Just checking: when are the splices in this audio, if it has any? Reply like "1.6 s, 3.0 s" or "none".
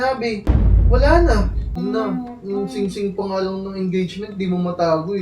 1.8 s